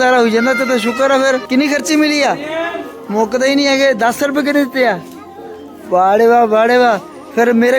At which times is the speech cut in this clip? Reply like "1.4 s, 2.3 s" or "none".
1.4 s